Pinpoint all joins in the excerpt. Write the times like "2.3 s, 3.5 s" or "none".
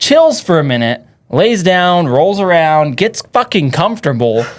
none